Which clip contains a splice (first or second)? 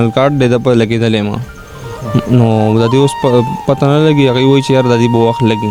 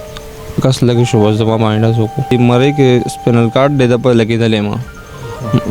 second